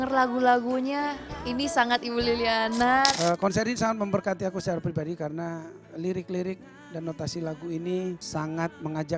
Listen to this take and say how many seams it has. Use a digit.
2